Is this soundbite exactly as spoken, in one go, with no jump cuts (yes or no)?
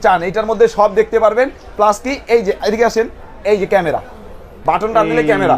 yes